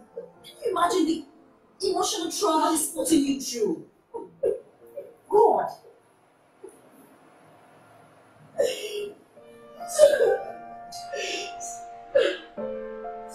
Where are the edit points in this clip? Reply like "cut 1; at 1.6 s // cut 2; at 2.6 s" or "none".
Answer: cut 1; at 11.0 s